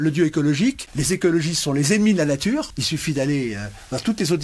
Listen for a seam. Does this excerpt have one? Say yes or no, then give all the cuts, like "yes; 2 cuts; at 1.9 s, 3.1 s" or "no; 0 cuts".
yes; 2 cuts; at 0.9 s, 2.8 s